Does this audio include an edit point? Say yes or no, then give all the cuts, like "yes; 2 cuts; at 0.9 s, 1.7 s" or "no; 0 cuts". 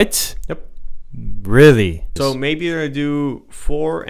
yes; 1 cut; at 2.0 s